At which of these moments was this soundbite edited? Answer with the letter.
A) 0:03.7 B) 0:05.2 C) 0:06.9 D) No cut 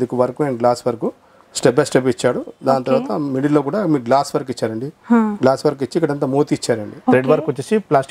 C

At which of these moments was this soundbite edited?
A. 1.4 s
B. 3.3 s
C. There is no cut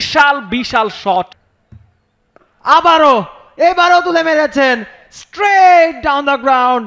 A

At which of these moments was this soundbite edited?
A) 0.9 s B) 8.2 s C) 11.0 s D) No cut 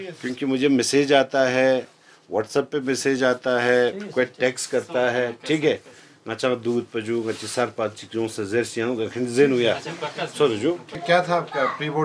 C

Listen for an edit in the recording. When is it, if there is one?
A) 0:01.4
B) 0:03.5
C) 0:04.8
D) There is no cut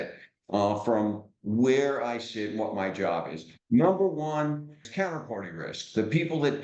C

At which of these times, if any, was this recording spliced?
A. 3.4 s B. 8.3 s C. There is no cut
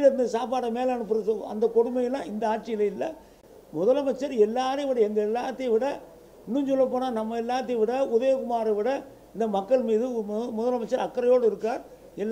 A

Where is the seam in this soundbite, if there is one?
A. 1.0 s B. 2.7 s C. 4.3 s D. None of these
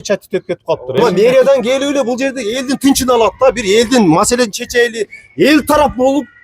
A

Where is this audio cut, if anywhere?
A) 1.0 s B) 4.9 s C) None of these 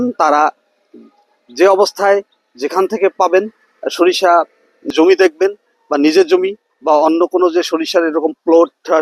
B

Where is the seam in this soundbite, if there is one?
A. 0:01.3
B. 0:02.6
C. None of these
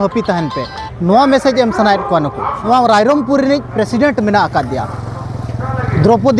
B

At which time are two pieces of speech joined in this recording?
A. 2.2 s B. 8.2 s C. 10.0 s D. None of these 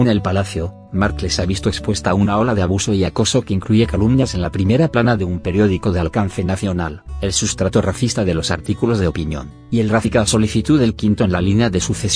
D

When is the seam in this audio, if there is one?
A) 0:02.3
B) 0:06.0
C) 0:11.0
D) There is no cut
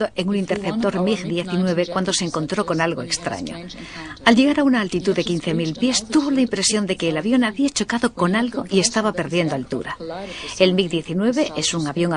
B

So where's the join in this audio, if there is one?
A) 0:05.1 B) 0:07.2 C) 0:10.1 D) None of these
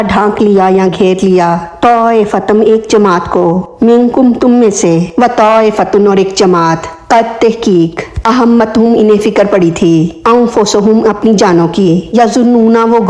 A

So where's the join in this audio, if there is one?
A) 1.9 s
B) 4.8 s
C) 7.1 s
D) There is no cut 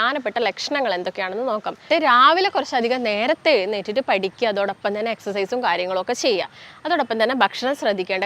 A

